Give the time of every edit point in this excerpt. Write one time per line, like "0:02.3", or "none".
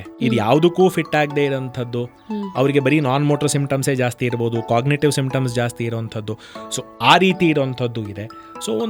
none